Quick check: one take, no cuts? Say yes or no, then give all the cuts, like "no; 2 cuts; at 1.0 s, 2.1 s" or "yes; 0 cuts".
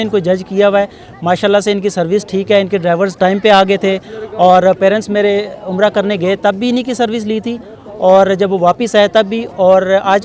yes; 0 cuts